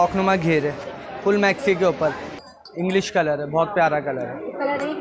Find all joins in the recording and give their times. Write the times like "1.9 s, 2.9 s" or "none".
2.3 s